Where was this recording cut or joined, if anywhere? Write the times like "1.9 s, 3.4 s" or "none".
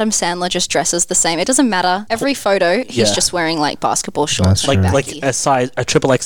2.0 s